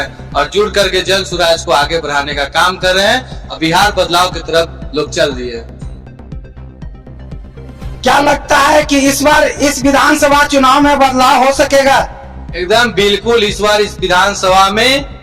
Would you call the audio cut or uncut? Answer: uncut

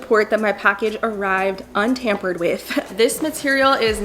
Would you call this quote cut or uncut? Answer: cut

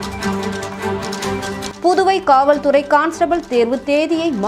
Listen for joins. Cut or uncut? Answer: cut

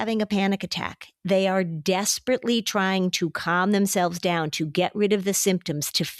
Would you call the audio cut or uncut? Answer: uncut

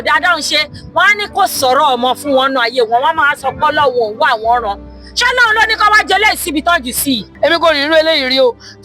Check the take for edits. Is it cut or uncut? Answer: cut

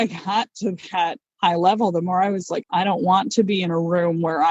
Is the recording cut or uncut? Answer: cut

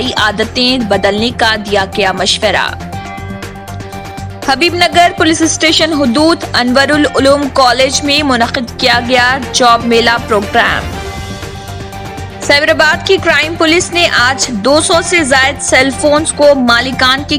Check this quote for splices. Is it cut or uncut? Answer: uncut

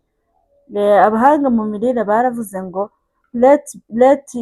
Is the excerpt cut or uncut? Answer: uncut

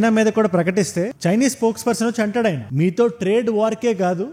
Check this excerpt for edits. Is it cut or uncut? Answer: cut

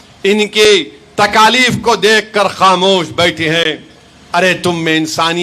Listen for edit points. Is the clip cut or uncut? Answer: uncut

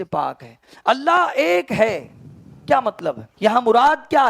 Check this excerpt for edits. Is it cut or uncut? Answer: cut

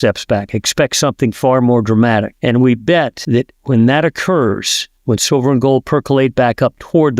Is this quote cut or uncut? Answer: cut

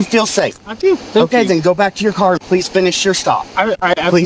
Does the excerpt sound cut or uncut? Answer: uncut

